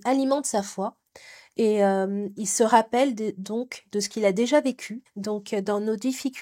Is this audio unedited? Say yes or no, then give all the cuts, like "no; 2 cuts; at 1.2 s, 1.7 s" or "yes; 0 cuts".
no; 1 cut; at 4.9 s